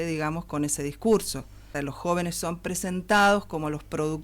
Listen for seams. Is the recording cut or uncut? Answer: cut